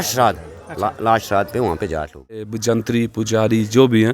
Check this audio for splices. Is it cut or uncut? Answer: cut